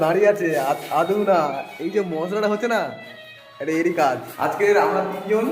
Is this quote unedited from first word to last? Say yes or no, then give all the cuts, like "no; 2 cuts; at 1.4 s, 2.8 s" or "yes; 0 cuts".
no; 1 cut; at 4.3 s